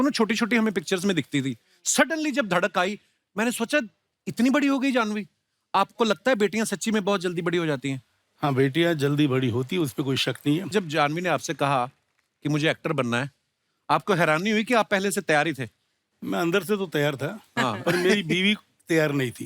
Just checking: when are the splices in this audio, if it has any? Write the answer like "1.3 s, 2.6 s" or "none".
10.7 s